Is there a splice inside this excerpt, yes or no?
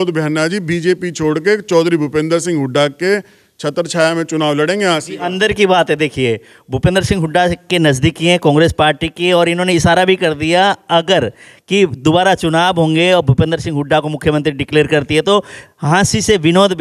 no